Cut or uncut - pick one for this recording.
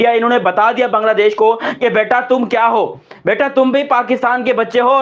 uncut